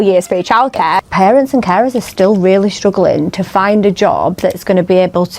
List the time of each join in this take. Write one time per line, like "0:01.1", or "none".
0:01.0